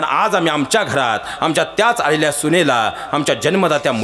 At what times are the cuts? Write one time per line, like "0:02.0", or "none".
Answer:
none